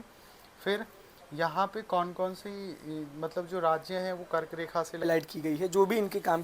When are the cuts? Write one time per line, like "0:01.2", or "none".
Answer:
0:05.0